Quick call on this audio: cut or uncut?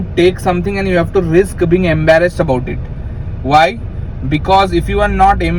uncut